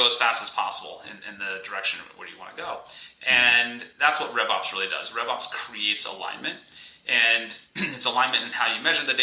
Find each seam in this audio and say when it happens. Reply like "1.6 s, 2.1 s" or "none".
none